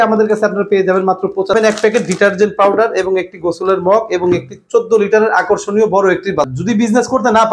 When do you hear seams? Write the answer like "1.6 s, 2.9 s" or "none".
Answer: 1.5 s, 6.6 s